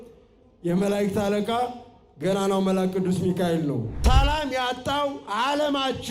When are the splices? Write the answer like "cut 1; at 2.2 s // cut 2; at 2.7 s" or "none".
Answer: cut 1; at 3.9 s